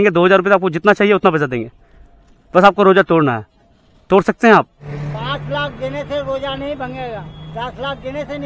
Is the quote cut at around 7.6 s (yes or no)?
yes